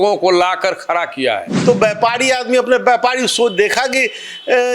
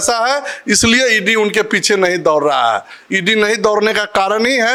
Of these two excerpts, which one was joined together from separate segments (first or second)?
first